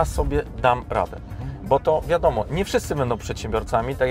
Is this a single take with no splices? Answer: yes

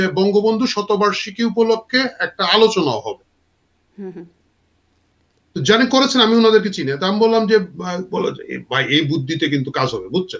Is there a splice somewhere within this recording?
no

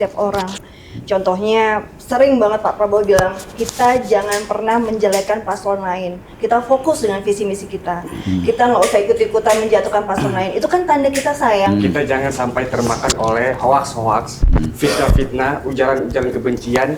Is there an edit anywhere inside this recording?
yes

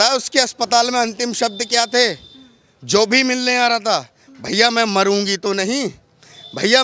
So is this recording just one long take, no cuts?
yes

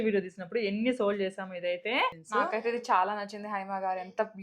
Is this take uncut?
no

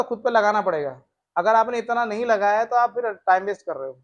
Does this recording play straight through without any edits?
yes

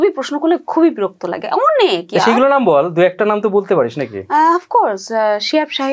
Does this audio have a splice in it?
no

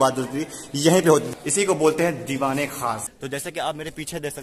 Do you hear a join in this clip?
yes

